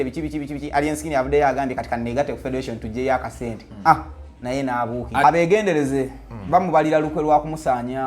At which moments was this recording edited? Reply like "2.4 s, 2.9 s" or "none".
5.2 s